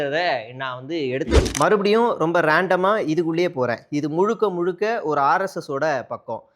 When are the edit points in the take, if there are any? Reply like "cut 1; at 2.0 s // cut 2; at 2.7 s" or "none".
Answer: cut 1; at 1.5 s